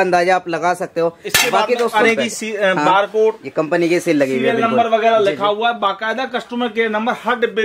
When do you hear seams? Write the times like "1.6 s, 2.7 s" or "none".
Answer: 1.9 s